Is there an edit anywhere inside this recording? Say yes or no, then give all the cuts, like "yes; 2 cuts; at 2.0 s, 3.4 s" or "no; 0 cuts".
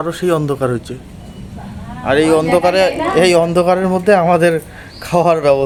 no; 0 cuts